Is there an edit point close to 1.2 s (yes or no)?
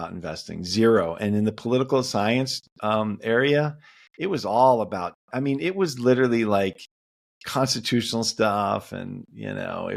no